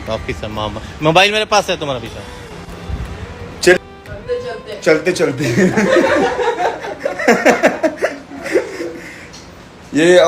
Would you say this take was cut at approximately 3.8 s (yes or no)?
yes